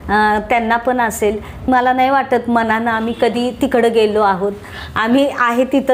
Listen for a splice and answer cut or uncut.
cut